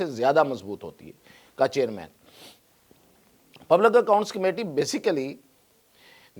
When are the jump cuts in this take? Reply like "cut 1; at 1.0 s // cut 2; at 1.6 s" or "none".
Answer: none